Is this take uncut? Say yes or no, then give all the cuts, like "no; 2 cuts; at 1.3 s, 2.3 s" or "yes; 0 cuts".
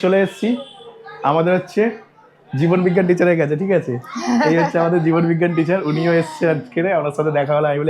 yes; 0 cuts